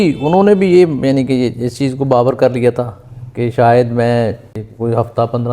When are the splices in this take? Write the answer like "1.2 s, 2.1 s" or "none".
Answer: 4.6 s